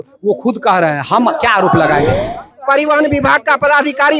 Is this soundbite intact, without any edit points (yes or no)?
no